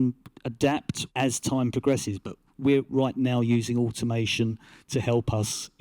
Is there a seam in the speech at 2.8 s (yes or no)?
yes